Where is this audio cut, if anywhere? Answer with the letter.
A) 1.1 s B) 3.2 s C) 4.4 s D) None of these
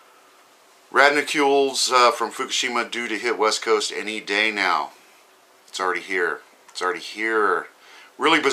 C